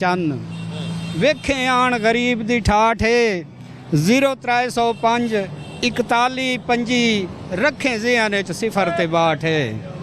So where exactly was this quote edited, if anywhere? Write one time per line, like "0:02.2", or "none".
none